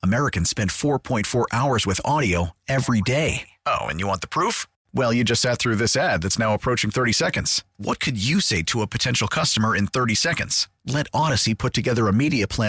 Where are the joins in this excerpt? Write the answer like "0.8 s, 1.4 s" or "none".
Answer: none